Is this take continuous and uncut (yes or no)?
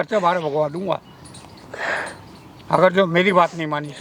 yes